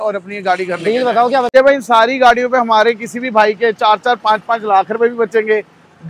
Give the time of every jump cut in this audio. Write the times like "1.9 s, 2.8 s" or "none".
1.5 s